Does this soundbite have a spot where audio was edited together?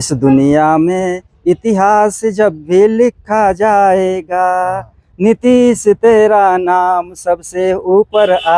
no; 0 cuts

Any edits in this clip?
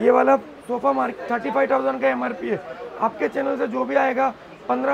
no; 0 cuts

